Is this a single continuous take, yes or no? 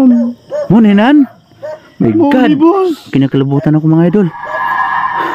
no